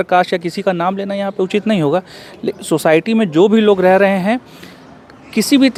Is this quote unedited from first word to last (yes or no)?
yes